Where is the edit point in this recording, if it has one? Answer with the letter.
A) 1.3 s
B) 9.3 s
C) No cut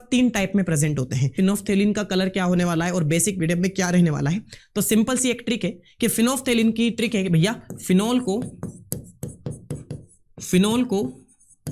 A